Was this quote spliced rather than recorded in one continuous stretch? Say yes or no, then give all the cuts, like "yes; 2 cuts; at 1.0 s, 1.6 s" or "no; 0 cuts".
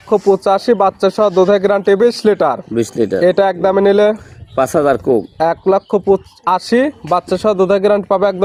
no; 0 cuts